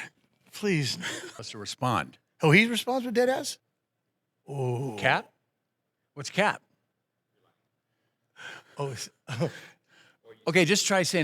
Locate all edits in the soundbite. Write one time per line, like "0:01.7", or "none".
0:01.3